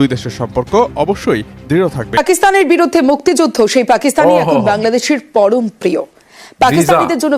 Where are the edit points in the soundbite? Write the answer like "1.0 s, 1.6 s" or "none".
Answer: 2.2 s